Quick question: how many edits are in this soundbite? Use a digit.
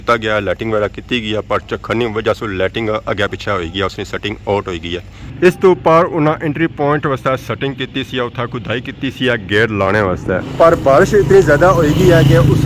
0